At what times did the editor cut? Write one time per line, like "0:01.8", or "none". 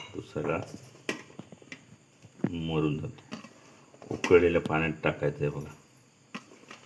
none